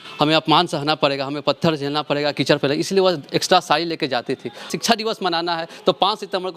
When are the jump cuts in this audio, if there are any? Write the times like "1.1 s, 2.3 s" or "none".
4.7 s